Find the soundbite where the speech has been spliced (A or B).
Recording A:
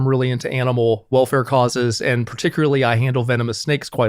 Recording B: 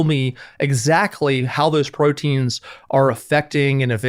A